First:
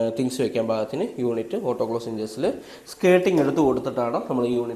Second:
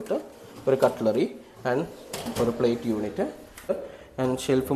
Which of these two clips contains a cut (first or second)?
second